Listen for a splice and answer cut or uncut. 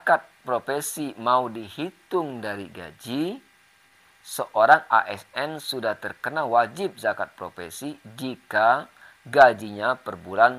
cut